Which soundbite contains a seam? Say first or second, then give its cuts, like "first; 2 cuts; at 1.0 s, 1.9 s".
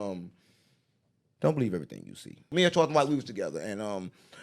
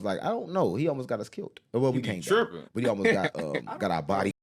first; 1 cut; at 2.5 s